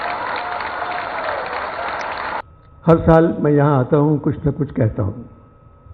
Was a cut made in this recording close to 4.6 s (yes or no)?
no